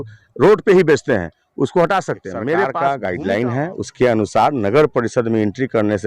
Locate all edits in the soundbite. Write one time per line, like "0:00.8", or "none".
0:02.8